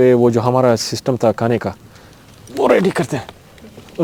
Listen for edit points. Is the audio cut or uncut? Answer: uncut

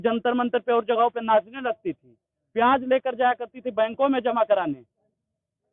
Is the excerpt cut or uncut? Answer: uncut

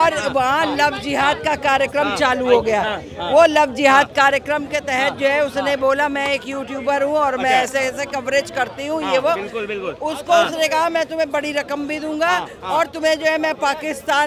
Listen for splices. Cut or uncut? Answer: uncut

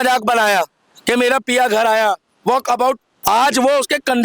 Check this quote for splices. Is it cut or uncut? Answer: cut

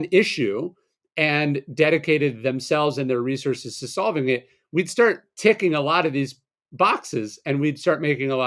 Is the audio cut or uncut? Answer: uncut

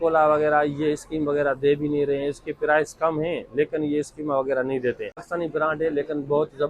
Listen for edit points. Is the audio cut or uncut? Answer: uncut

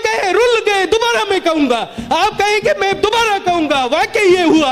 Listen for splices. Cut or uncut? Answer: uncut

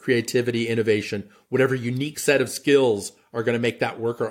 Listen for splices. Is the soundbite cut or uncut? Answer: uncut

